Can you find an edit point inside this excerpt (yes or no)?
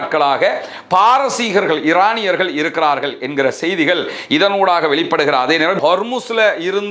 yes